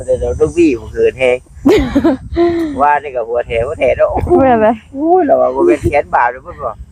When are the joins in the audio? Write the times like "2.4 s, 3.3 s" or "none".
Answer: none